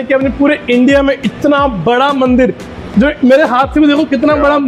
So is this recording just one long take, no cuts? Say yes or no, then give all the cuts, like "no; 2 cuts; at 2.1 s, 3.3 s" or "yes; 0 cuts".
yes; 0 cuts